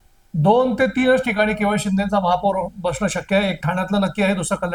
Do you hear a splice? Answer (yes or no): no